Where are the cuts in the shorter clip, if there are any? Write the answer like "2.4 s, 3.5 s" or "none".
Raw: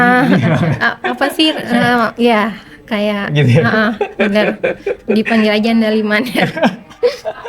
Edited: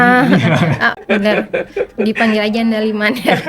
1.0 s